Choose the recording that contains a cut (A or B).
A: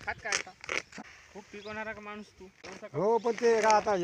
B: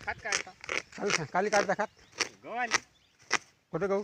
A